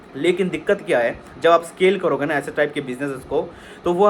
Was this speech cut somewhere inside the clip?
no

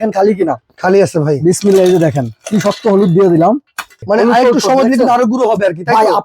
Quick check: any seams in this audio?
yes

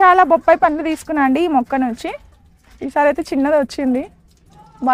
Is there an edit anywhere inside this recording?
no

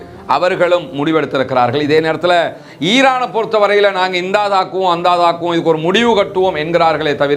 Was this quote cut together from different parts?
no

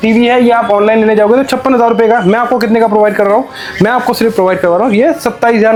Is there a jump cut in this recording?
no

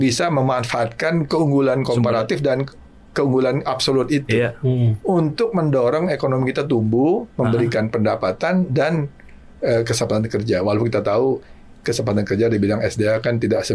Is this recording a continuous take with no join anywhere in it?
yes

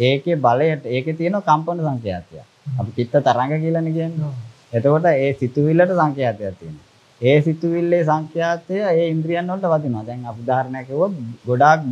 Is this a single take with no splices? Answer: yes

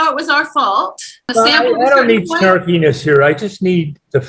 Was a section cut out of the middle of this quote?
yes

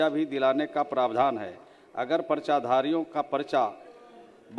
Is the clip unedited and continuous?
yes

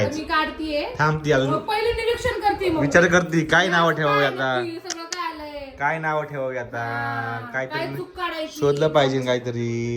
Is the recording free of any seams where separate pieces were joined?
yes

